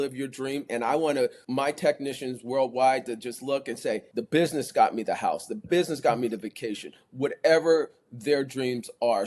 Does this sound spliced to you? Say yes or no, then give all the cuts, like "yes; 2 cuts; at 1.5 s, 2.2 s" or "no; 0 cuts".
yes; 2 cuts; at 1.4 s, 4.1 s